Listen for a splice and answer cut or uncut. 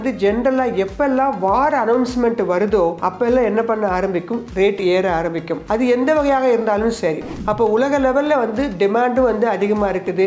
cut